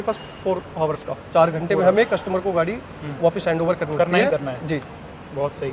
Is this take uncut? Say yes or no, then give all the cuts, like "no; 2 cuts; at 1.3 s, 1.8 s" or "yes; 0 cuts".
yes; 0 cuts